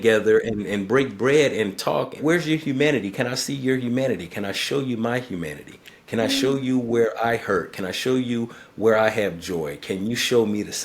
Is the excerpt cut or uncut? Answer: cut